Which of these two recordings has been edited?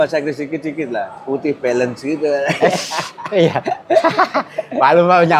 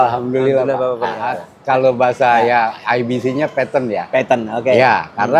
second; 1 cut; at 1.5 s

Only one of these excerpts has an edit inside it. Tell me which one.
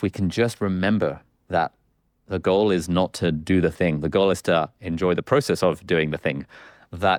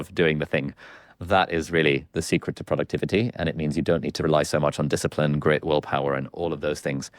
second; 1 cut; at 4.2 s

